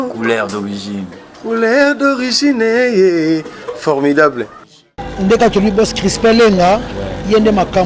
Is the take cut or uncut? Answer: cut